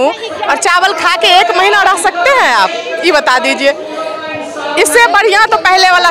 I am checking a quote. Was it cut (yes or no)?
no